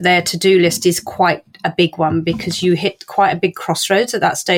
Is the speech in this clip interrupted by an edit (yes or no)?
no